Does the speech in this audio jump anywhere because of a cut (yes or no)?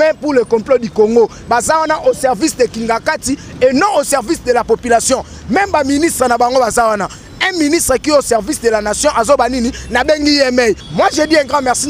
yes